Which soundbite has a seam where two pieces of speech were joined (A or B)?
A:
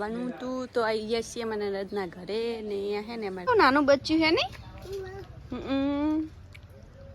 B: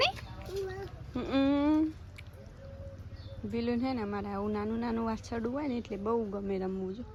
A